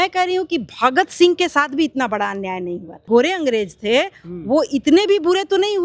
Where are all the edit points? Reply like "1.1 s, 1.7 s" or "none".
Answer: 3.0 s